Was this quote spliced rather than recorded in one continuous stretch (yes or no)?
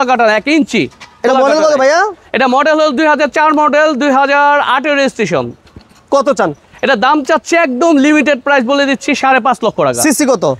no